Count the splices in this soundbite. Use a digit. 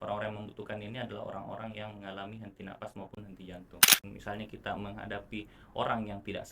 1